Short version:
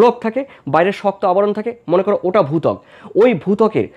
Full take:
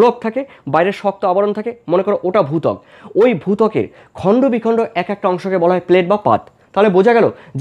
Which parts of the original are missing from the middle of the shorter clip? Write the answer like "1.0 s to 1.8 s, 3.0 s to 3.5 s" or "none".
none

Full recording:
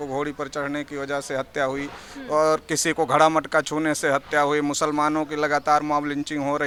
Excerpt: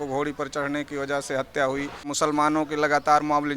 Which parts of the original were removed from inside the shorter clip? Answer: 2.1 s to 4.7 s

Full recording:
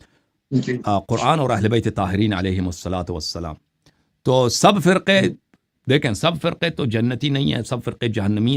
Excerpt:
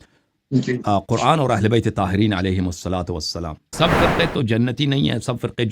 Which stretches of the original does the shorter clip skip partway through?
3.7 s to 6.2 s

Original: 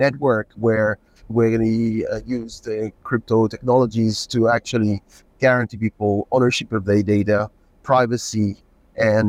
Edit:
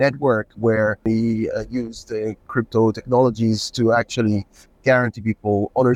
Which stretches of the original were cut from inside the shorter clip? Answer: 1.1 s to 1.6 s

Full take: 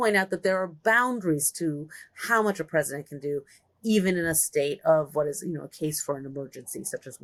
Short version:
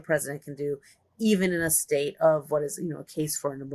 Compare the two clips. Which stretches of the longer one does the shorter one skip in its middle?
none

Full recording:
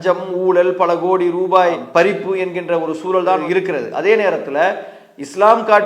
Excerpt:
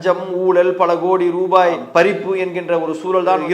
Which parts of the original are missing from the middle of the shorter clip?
none

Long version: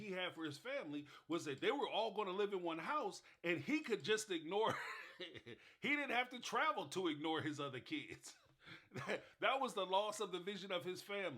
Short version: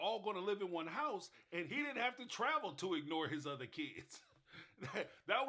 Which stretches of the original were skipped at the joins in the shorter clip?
3.6 s to 5.8 s

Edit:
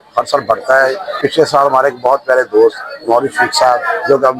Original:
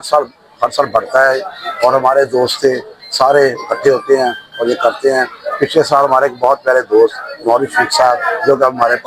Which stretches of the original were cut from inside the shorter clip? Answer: 1.5 s to 5.4 s

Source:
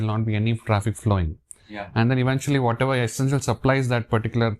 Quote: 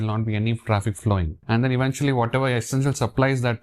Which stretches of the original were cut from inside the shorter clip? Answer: 1.4 s to 1.8 s

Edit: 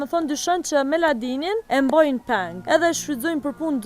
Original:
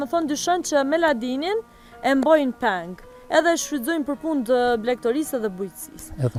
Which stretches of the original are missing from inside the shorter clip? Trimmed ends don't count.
1.6 s to 2.0 s, 2.9 s to 3.2 s

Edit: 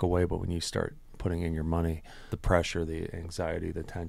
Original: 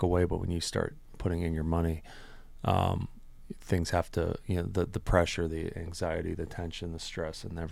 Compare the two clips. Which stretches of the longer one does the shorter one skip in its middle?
2.3 s to 5.0 s

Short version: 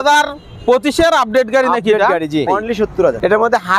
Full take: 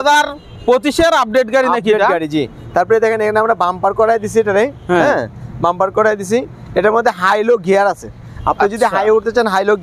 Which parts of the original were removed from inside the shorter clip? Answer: 2.7 s to 6.3 s

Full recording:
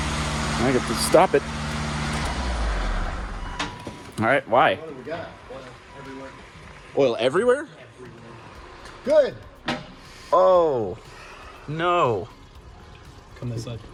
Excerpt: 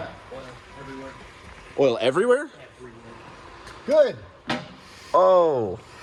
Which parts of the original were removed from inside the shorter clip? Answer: none

